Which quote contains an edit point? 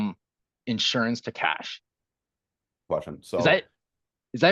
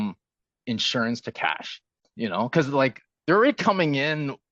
second; 1 cut; at 2.1 s

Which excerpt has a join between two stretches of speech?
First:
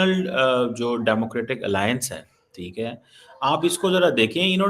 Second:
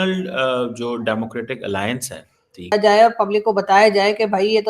second; 1 cut; at 2.7 s

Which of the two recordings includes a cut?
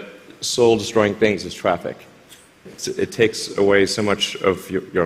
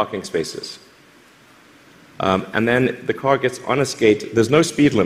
first; 1 cut; at 2.7 s

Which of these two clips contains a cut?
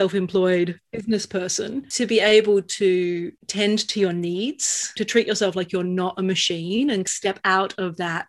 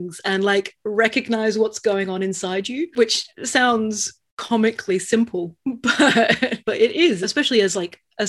first; 2 cuts; at 0.9 s, 3.4 s

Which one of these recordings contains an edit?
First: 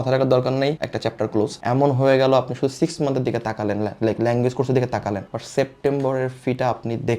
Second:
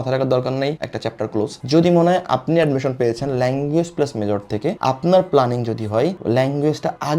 first; 1 cut; at 1.6 s

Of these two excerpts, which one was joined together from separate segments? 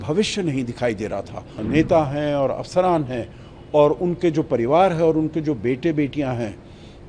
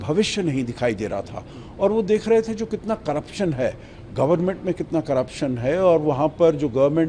first; 1 cut; at 1.6 s

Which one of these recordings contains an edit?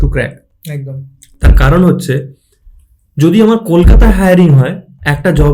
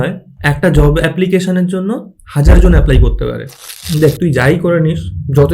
second; 1 cut; at 3.8 s

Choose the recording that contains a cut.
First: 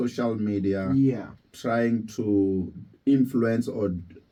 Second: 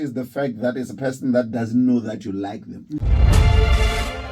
second; 1 cut; at 3.0 s

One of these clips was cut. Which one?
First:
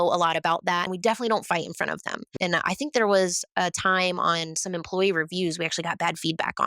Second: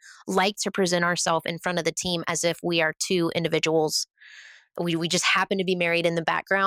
first; 2 cuts; at 0.9 s, 2.3 s

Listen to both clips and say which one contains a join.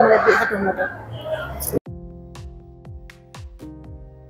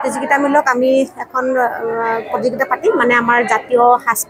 first; 1 cut; at 1.8 s

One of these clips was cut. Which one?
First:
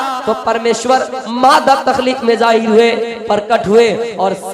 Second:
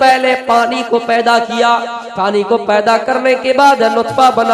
second; 1 cut; at 2.0 s

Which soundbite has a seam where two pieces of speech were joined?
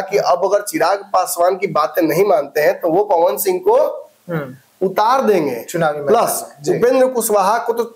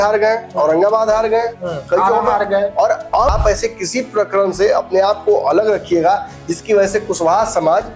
second; 1 cut; at 3.3 s

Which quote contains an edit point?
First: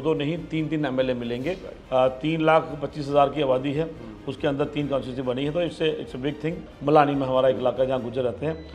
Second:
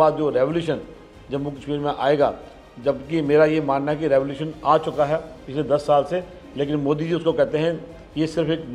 first; 2 cuts; at 1.7 s, 6.6 s

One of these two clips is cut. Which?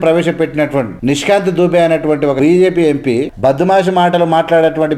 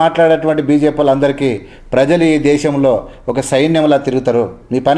first; 3 cuts; at 0.9 s, 2.3 s, 3.3 s

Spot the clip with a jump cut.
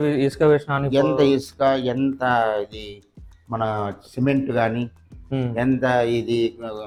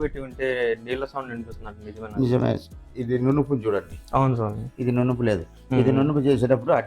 second; 1 cut; at 2.9 s

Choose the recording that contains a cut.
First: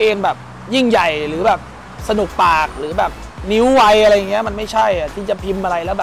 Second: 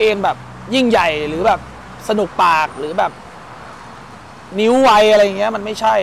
first; 1 cut; at 3.3 s

